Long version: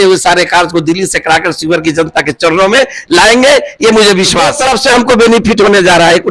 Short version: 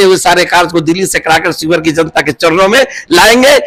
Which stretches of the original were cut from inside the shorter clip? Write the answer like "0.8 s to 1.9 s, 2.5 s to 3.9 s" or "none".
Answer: none

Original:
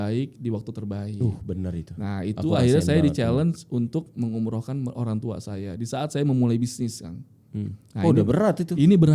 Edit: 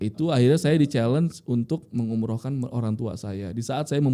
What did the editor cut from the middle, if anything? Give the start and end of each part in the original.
none

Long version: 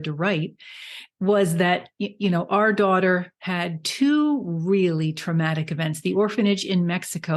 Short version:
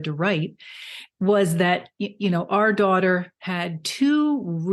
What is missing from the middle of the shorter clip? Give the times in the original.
none

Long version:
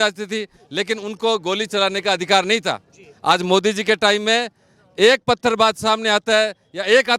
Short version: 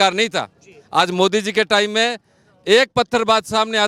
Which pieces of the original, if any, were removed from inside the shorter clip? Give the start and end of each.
none

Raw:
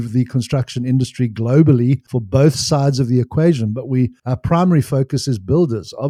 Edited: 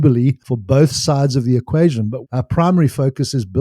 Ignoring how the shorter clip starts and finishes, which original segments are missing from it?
3.9 s to 4.2 s

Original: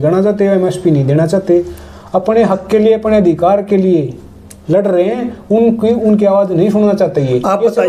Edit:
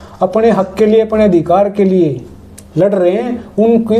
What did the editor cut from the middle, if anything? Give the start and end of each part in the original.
none

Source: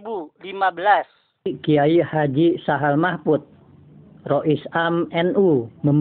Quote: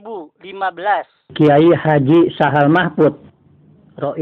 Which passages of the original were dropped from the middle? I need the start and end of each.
1.3 s to 1.6 s

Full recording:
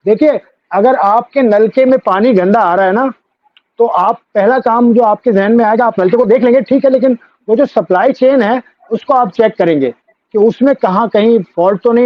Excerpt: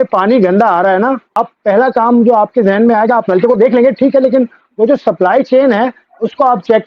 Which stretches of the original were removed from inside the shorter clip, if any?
3.3 s to 4.0 s

